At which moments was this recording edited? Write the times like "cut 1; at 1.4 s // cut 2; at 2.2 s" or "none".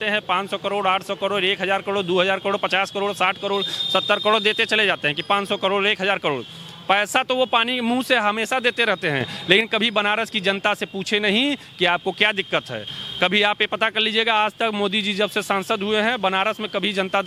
none